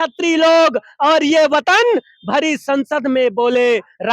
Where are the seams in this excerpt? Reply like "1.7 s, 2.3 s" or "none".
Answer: none

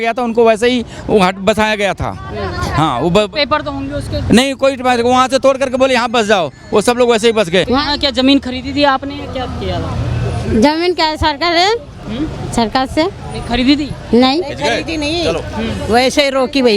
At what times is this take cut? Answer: 7.7 s

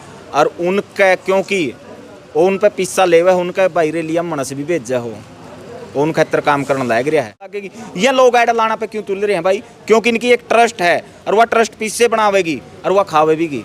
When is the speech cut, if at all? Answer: 7.8 s

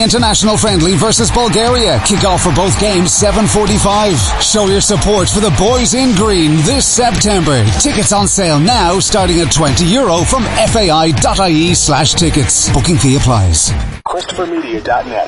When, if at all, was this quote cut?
13.9 s

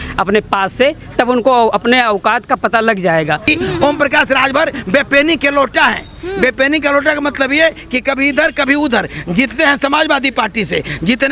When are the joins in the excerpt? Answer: 3.4 s

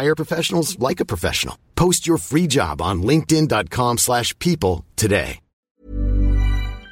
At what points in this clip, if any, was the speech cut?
5.5 s

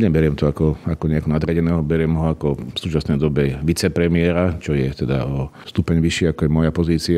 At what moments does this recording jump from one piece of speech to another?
2.7 s, 5.6 s

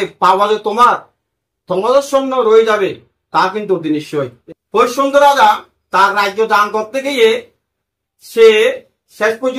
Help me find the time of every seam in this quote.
4.4 s

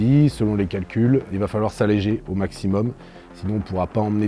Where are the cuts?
1.3 s

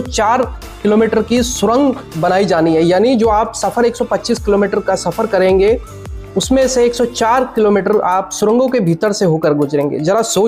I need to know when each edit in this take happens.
none

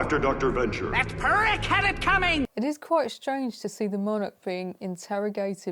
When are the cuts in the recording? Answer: 2.5 s

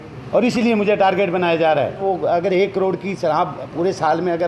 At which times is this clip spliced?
2.0 s

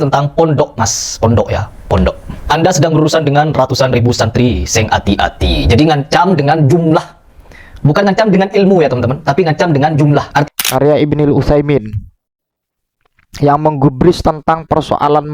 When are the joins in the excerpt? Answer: 10.5 s

